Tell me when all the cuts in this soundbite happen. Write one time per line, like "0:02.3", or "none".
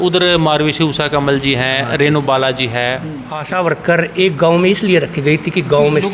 0:03.4